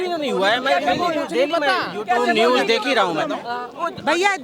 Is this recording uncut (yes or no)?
yes